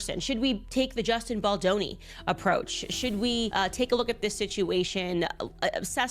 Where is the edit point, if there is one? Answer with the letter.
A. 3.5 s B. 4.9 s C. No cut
A